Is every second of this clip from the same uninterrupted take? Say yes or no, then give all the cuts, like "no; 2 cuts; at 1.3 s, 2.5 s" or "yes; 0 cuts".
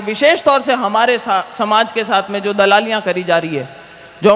yes; 0 cuts